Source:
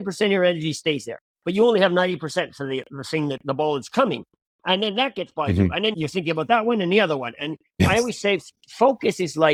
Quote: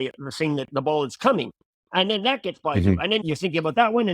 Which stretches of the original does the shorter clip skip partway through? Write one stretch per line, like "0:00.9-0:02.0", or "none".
none